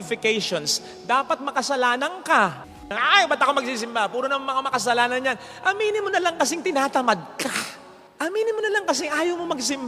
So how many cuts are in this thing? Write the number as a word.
one